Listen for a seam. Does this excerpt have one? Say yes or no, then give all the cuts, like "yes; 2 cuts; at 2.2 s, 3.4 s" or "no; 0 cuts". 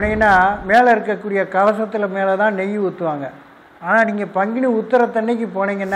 no; 0 cuts